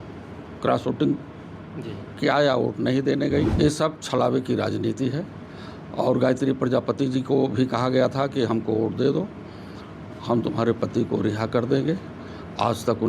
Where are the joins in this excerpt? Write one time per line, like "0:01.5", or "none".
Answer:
0:03.5